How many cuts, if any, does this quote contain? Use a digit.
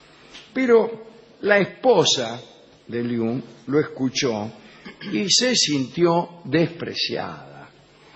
1